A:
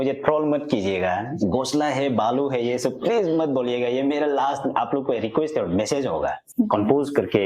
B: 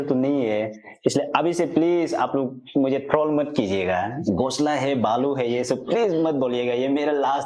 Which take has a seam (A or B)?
A